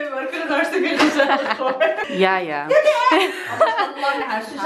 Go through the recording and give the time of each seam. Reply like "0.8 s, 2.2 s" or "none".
2.1 s